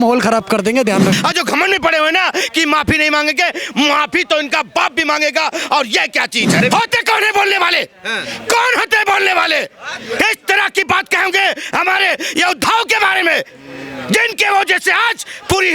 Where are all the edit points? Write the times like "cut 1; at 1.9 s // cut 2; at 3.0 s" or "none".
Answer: cut 1; at 1.2 s // cut 2; at 6.6 s